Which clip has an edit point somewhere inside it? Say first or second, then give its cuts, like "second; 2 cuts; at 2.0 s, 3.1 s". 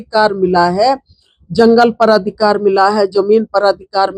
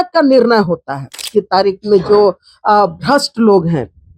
second; 1 cut; at 1.2 s